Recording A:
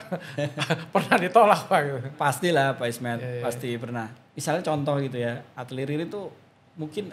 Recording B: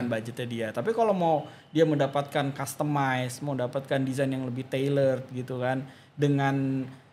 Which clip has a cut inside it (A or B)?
A